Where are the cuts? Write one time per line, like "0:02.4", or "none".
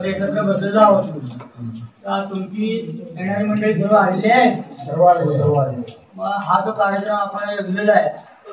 none